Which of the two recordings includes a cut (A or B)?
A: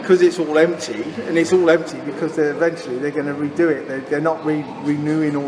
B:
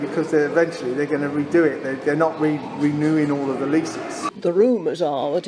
B